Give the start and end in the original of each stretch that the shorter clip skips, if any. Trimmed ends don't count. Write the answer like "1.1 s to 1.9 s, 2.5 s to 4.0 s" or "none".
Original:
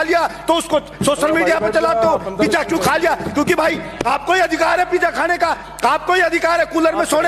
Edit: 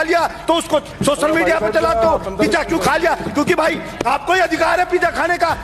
none